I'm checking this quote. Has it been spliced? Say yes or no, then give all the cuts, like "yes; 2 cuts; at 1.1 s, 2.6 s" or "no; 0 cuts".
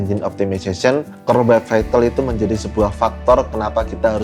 no; 0 cuts